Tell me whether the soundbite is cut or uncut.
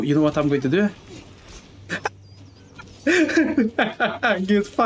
uncut